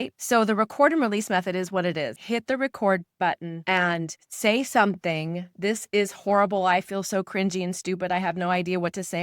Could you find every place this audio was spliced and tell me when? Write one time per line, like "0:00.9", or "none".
0:02.2